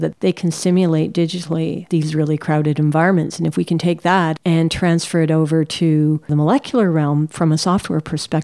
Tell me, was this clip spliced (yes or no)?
yes